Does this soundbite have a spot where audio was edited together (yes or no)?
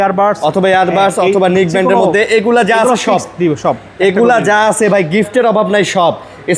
no